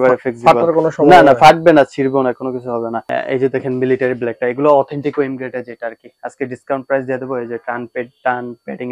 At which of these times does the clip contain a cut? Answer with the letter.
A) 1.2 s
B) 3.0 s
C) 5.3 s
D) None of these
B